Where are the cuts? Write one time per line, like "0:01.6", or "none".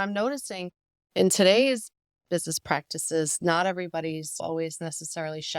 0:02.4
0:04.4